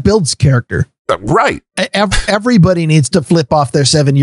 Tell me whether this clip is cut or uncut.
uncut